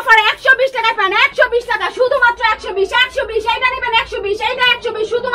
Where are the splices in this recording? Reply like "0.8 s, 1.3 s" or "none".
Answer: none